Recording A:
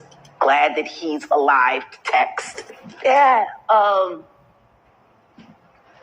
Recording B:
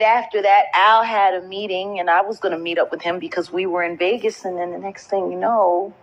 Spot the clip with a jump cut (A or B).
A